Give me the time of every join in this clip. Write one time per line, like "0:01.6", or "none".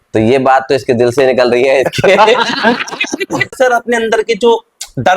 0:03.5